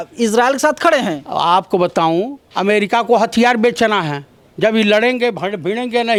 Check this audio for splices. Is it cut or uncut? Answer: uncut